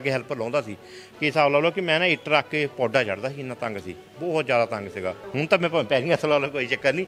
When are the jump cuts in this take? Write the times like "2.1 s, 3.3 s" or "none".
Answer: 5.3 s